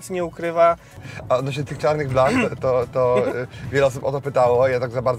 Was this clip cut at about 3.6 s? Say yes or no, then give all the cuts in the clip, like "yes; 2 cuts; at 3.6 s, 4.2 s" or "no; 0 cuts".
no; 1 cut; at 0.9 s